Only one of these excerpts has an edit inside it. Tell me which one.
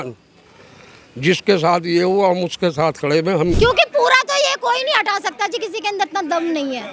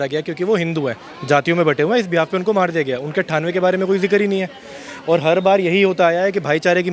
first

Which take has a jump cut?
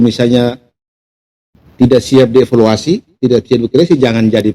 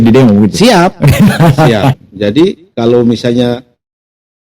second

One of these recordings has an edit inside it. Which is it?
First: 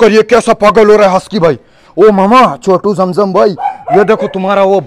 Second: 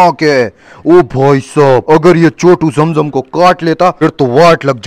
second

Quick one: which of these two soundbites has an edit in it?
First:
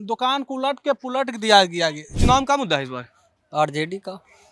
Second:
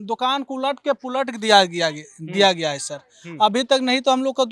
first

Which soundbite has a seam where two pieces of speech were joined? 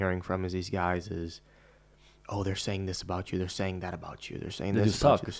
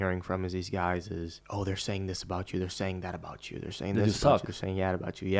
second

